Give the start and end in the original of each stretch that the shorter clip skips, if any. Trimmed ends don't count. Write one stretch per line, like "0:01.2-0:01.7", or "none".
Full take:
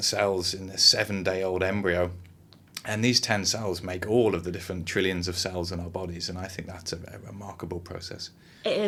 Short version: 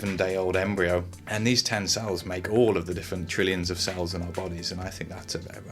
0:02.3-0:02.8